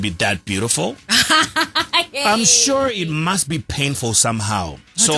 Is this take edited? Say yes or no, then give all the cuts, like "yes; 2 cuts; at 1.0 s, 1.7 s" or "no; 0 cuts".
no; 0 cuts